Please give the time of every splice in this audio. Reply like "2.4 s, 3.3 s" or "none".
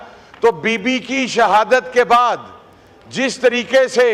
none